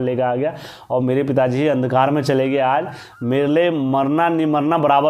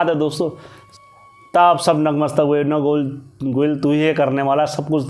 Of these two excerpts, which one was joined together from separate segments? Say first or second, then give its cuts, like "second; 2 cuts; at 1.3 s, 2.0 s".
second; 1 cut; at 1.1 s